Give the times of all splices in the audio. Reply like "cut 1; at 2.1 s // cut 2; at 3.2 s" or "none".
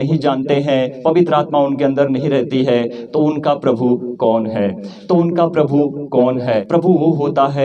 cut 1; at 0.9 s // cut 2; at 6.6 s